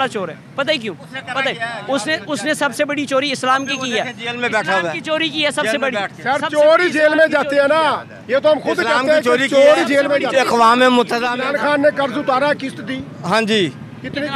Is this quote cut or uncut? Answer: cut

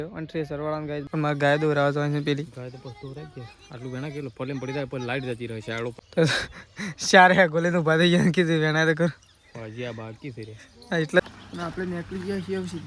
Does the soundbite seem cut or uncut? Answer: cut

